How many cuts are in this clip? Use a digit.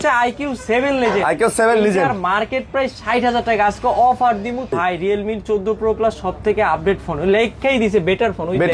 1